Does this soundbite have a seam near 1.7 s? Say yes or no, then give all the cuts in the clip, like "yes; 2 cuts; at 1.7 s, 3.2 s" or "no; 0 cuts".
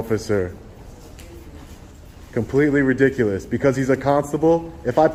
no; 0 cuts